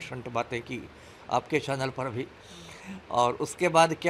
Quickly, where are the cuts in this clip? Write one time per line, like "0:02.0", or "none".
none

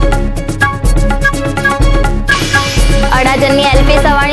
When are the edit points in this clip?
0:03.0

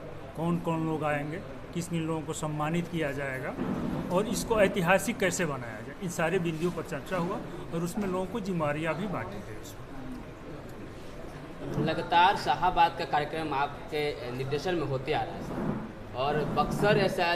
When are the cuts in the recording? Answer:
none

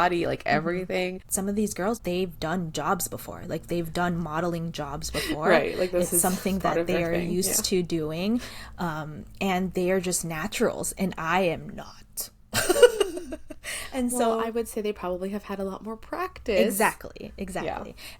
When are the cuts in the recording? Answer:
0:01.2

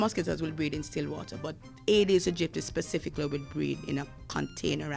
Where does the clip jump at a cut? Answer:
none

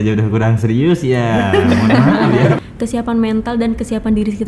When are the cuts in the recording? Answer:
0:02.6

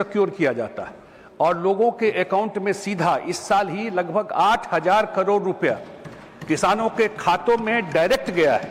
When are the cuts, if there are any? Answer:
none

